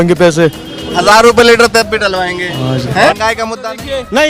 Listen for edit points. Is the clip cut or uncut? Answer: cut